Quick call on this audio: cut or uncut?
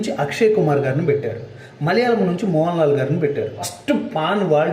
cut